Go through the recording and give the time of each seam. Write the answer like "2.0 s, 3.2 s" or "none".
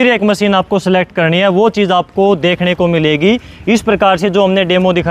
none

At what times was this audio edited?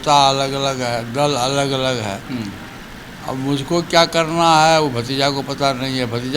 none

